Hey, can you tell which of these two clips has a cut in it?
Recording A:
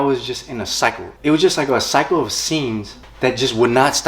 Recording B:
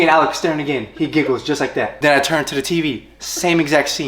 A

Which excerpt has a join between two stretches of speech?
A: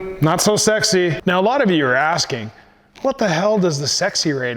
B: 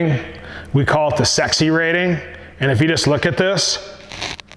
A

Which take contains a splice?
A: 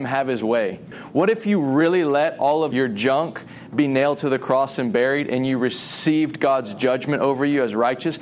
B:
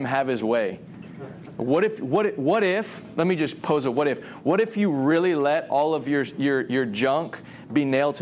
A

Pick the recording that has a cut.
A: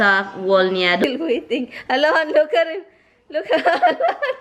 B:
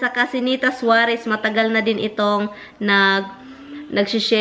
A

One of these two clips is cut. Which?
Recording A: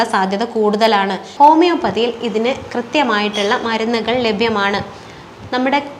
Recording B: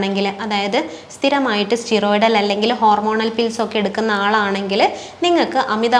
A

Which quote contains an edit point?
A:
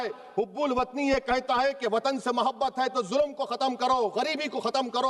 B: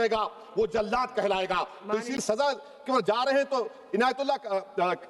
B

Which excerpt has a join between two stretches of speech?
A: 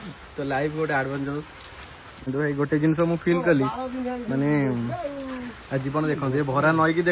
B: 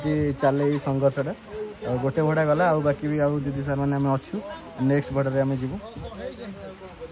A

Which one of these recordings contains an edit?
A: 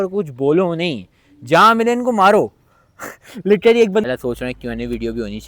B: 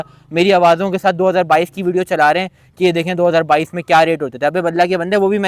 A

